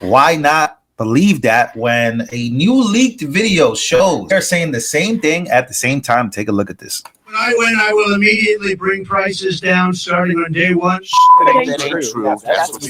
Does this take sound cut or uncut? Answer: cut